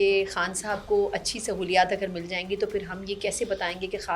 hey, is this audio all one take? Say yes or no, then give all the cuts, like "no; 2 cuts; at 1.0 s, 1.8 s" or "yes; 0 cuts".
yes; 0 cuts